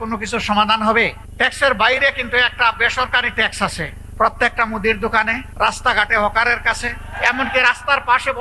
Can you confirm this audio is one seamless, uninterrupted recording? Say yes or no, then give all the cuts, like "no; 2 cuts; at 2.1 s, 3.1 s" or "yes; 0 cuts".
no; 4 cuts; at 1.2 s, 4.0 s, 5.4 s, 7.1 s